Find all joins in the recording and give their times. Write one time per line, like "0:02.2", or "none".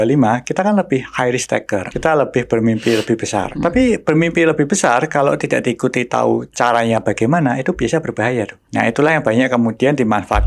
0:01.9
0:03.5
0:08.6